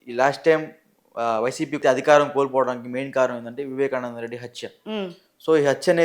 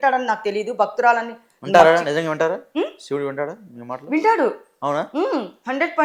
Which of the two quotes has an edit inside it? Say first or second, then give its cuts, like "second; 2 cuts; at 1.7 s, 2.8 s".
first; 1 cut; at 1.8 s